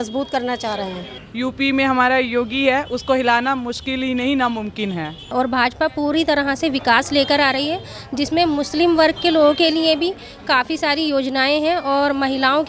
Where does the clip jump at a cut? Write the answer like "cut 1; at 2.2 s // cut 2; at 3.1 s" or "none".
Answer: cut 1; at 1.2 s // cut 2; at 5.3 s

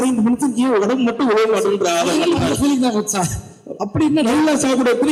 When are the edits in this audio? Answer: none

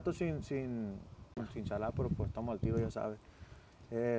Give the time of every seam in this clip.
cut 1; at 1.4 s

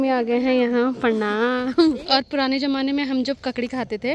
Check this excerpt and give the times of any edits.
cut 1; at 2.0 s

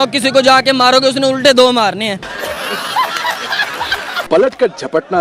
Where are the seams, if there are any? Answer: cut 1; at 4.2 s

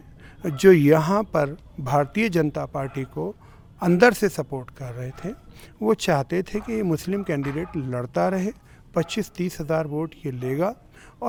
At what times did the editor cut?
none

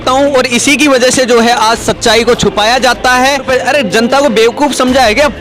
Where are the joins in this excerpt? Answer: cut 1; at 3.5 s

